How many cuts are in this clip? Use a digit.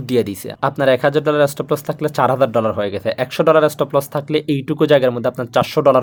0